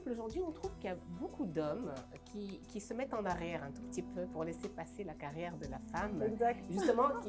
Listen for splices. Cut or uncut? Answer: uncut